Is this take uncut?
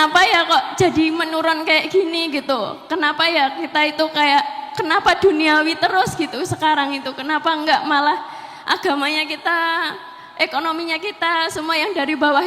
yes; 0 cuts

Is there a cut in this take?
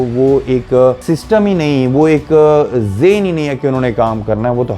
yes; 1 cut; at 1.0 s

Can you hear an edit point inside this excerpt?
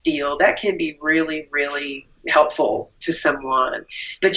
no; 0 cuts

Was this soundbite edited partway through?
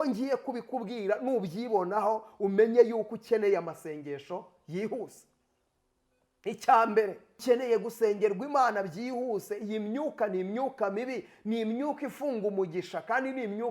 yes; 1 cut; at 7.4 s

